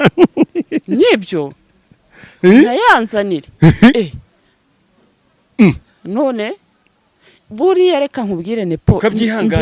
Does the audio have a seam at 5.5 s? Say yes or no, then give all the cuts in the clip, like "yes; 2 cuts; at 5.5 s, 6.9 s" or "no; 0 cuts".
no; 0 cuts